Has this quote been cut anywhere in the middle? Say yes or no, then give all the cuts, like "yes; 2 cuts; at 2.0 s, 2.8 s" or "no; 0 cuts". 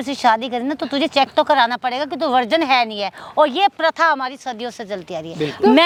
no; 0 cuts